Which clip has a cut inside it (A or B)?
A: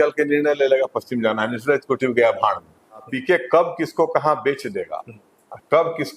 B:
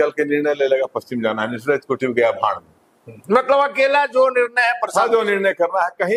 A